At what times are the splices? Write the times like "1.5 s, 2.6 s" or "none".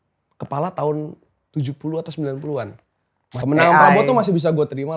3.4 s